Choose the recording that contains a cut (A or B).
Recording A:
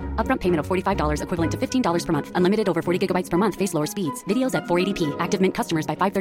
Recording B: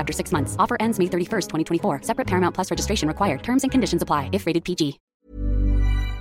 B